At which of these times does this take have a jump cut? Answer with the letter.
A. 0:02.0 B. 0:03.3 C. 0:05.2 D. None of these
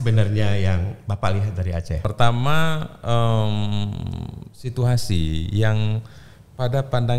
A